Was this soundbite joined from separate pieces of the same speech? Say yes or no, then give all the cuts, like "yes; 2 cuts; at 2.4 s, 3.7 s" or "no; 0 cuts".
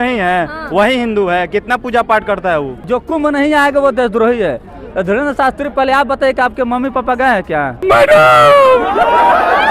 yes; 2 cuts; at 2.8 s, 7.8 s